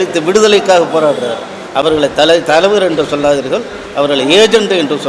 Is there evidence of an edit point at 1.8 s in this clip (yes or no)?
no